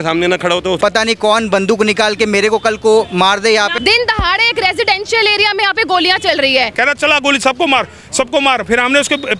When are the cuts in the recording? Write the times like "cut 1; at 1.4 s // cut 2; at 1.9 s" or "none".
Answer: cut 1; at 0.8 s // cut 2; at 3.8 s // cut 3; at 6.7 s